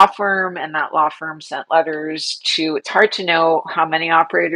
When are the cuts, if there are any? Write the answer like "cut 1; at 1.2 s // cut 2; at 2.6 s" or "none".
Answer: none